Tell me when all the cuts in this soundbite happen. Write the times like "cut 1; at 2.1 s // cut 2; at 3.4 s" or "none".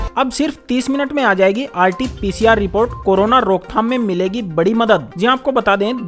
none